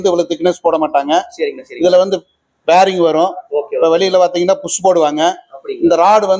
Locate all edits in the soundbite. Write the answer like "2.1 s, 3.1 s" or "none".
none